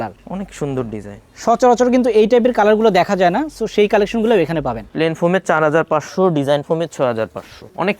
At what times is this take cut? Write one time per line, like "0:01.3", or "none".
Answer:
0:04.8